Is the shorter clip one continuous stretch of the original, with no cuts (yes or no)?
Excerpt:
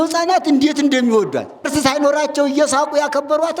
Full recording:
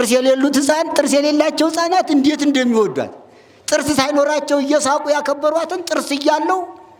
no